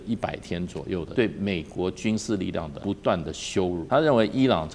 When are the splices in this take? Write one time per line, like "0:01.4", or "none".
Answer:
0:01.1
0:02.7
0:03.8